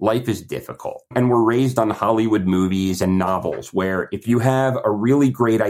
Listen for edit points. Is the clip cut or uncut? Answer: cut